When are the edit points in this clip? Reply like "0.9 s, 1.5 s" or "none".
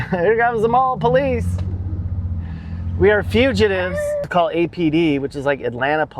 4.2 s